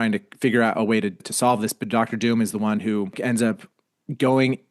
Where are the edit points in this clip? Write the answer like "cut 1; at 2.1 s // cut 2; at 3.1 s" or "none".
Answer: cut 1; at 3.2 s